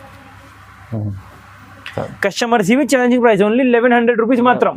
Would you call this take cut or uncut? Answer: uncut